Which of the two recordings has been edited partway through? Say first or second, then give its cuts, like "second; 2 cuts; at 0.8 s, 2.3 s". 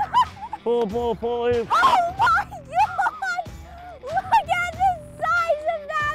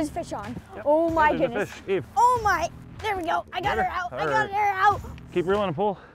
second; 2 cuts; at 2.1 s, 5.2 s